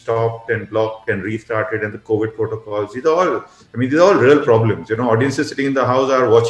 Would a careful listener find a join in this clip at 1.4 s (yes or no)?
no